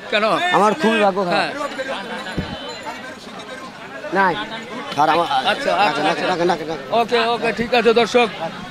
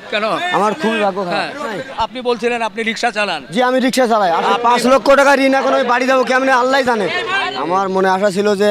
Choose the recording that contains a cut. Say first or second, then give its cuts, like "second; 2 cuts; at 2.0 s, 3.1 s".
second; 3 cuts; at 1.9 s, 4.4 s, 7.4 s